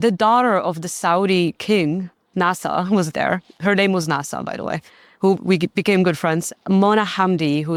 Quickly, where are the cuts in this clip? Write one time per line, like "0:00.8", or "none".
none